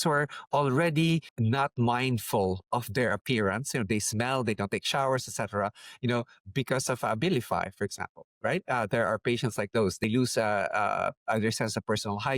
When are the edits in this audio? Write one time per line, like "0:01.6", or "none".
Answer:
0:01.3
0:10.0